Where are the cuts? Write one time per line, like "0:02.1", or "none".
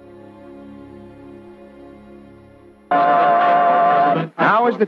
0:02.9